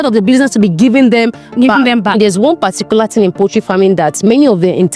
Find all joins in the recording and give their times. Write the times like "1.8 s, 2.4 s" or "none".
2.2 s, 4.2 s

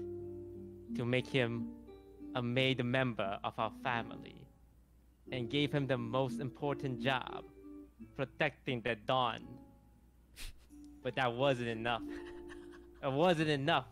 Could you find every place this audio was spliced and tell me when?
none

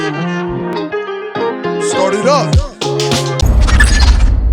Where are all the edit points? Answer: 3.4 s

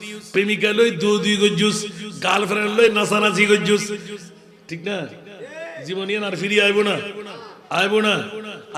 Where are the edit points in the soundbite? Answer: none

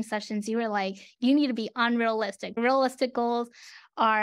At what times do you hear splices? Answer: 1.1 s, 2.5 s

